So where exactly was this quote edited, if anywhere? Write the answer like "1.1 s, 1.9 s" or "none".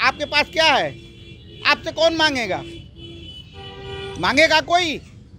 none